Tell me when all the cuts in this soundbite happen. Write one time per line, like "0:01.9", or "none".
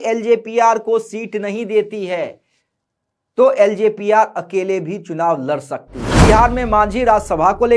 0:06.2